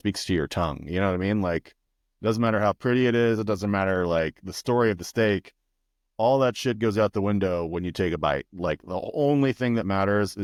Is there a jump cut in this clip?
no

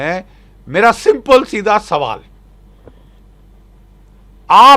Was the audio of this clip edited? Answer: no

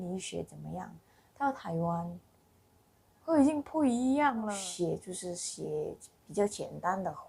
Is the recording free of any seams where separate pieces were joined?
no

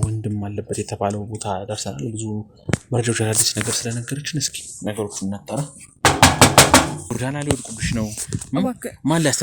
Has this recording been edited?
yes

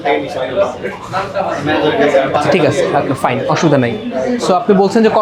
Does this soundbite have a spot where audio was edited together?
no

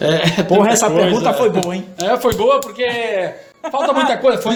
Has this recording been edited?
no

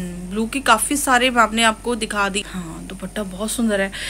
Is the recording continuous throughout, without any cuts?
no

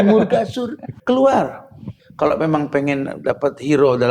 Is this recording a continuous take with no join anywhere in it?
no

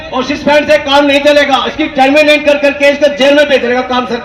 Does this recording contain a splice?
no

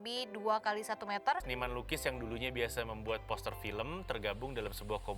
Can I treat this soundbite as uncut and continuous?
no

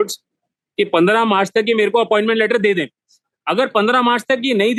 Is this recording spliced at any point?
no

